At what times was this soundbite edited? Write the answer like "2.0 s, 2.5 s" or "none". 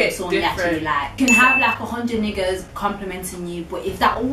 1.2 s